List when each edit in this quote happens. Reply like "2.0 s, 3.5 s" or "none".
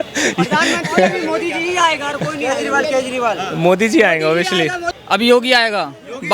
4.9 s